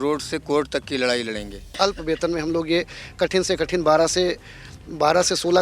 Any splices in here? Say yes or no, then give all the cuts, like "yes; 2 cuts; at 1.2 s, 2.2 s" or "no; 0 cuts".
yes; 1 cut; at 1.7 s